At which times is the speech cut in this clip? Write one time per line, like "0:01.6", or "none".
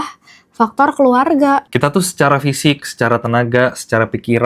0:01.7